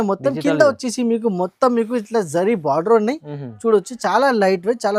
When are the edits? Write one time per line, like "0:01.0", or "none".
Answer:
none